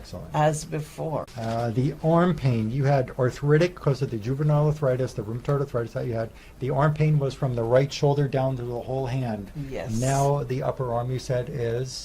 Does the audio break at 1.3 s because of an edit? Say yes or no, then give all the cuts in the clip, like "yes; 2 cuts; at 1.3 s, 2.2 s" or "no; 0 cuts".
yes; 1 cut; at 1.3 s